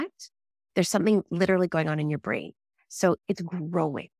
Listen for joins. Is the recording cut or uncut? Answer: cut